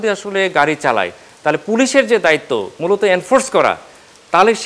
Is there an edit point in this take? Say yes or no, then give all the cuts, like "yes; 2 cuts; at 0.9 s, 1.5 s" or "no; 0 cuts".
no; 0 cuts